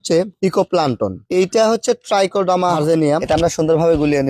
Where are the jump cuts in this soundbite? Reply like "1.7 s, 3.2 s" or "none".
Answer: 3.2 s